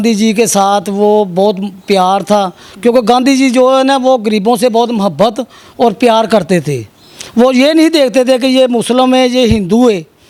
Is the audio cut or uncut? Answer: uncut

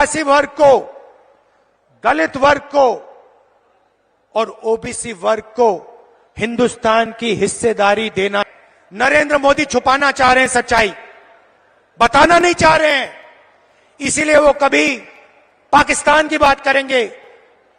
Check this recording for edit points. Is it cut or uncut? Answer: cut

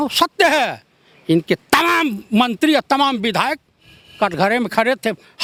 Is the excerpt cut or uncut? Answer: uncut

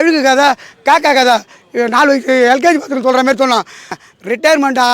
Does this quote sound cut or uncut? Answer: cut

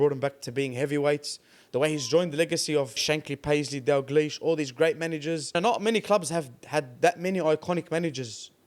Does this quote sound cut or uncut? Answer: cut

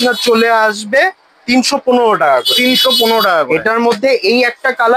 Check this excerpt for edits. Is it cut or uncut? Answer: uncut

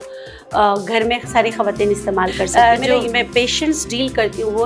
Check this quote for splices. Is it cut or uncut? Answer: cut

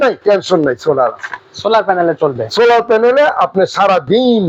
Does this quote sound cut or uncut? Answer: uncut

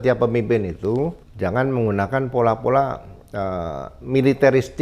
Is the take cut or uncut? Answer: cut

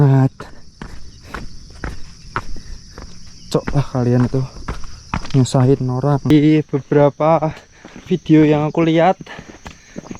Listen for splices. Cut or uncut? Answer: cut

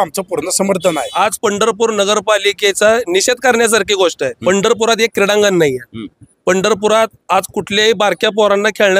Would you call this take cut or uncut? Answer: cut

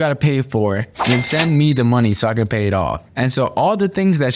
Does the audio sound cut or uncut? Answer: cut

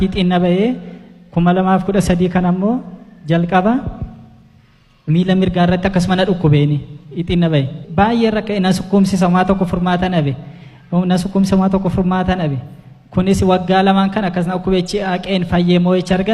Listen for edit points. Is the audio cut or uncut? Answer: uncut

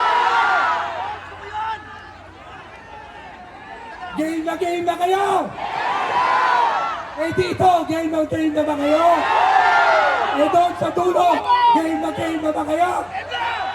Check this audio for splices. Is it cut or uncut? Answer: uncut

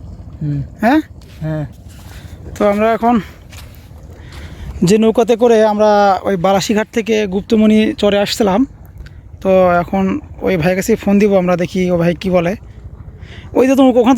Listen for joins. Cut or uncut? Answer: cut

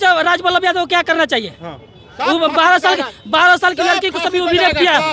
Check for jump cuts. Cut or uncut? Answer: uncut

